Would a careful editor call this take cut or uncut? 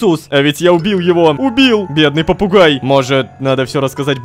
cut